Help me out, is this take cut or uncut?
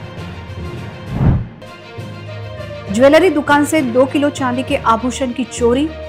uncut